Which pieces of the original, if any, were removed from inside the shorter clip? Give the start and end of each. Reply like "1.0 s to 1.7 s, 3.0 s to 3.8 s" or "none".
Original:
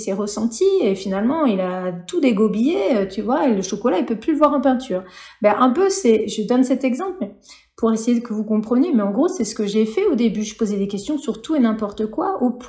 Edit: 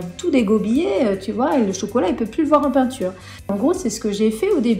5.4 s to 9.0 s